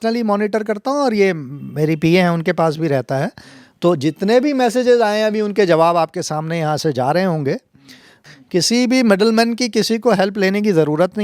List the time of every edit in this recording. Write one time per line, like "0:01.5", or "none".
0:08.2

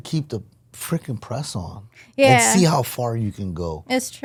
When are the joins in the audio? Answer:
none

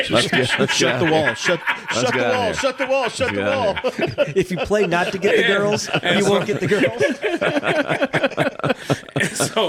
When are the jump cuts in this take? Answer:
none

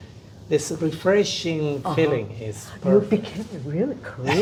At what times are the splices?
none

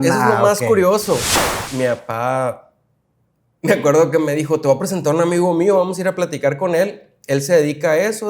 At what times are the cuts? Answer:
0:01.3

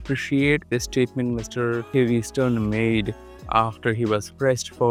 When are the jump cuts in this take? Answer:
none

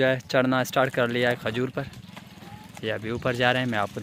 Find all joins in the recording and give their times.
none

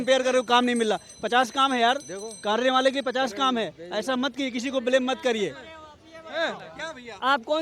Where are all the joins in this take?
none

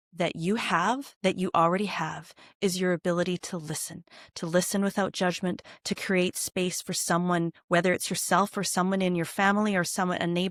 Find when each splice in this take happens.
none

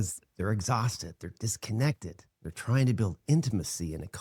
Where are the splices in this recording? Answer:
none

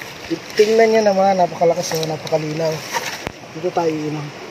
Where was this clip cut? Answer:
none

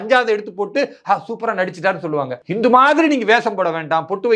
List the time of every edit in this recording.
0:02.4

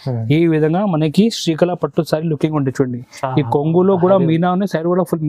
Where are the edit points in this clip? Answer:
none

